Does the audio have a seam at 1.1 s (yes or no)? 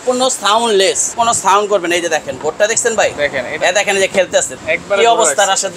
yes